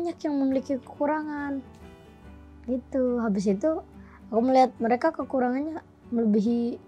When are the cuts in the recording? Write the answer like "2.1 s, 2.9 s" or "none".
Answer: none